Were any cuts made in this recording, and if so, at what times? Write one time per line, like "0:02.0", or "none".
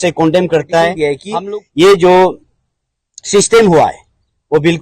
0:01.2